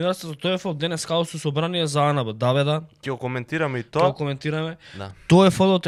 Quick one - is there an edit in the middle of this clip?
no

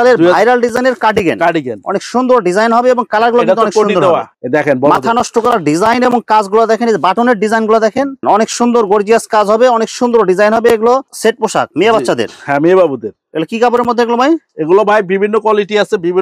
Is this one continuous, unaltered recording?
no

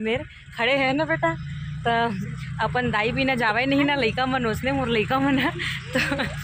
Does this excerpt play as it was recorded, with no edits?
yes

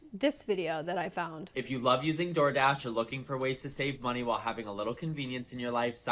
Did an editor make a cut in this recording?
yes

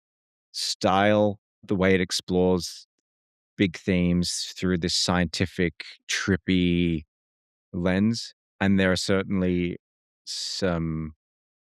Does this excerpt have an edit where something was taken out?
no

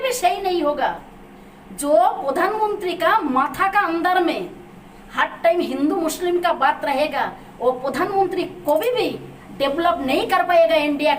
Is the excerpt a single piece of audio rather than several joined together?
yes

